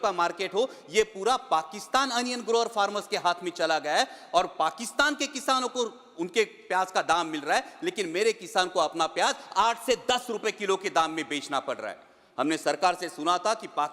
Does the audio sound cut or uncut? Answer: uncut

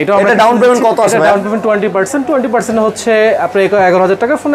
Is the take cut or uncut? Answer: uncut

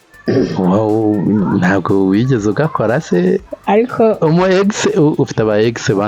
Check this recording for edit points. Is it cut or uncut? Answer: cut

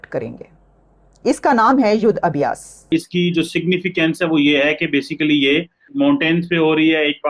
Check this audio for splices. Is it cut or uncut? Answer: cut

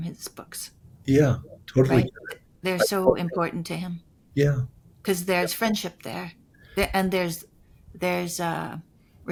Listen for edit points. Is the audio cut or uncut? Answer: uncut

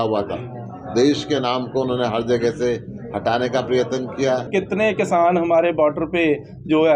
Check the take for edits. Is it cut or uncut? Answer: cut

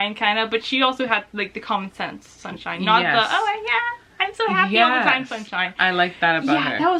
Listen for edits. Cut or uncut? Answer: uncut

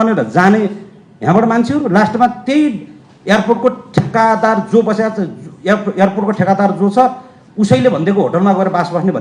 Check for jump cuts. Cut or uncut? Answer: uncut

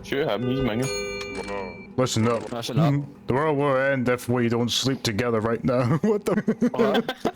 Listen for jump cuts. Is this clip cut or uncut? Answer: cut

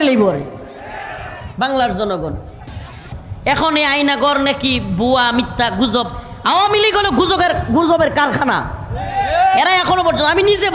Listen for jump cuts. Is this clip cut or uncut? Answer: cut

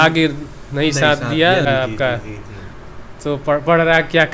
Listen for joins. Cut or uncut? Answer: cut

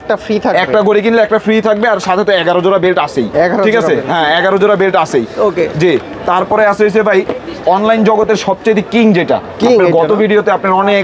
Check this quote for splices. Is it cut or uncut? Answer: uncut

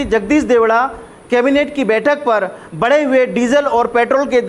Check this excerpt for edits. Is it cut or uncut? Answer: uncut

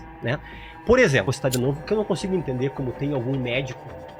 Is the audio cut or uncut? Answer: cut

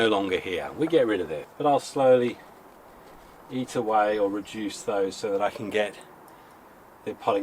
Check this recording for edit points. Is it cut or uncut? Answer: cut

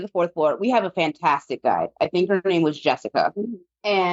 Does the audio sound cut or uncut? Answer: uncut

